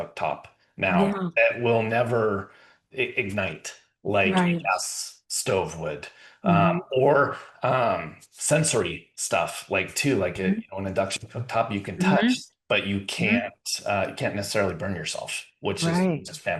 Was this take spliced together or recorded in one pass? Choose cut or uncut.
uncut